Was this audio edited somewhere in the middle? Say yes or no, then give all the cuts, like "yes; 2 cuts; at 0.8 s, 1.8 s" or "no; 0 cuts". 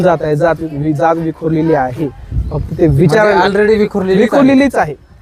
no; 0 cuts